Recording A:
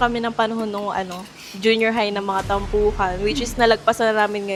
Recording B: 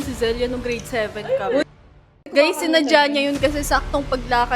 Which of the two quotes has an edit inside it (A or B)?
B